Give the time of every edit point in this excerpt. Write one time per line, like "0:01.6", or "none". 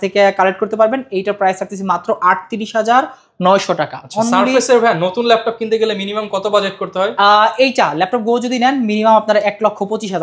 none